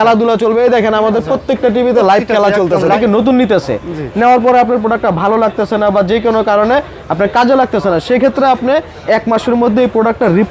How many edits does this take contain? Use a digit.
1